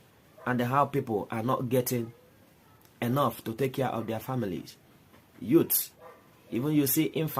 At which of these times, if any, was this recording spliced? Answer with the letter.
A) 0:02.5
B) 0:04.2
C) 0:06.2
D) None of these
D